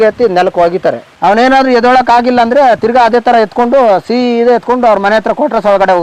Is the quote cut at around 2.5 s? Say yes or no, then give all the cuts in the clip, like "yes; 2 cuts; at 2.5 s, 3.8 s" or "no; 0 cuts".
no; 1 cut; at 1.1 s